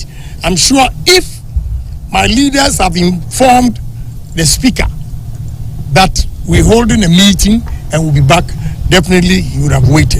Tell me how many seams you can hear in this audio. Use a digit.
0